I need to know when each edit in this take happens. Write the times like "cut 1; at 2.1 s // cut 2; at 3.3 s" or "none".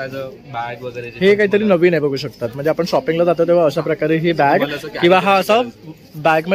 none